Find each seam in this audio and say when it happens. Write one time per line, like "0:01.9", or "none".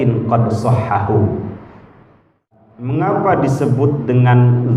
0:02.6